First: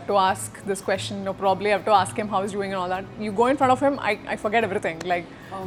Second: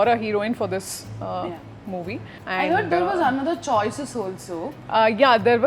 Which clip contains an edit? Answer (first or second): second